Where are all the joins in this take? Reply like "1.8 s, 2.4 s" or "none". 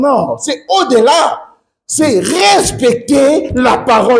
none